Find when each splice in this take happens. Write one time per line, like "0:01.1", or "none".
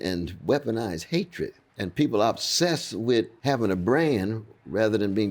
0:01.6
0:03.3